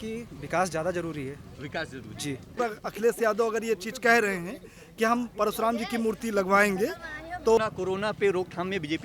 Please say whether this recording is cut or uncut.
cut